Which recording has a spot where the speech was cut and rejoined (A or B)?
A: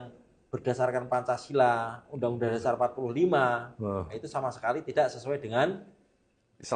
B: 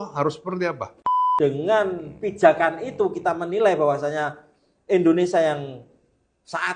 B